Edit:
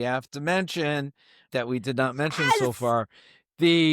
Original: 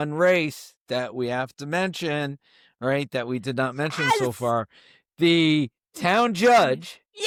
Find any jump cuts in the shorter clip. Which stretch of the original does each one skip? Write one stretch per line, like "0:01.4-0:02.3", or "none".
0:02.7-0:03.1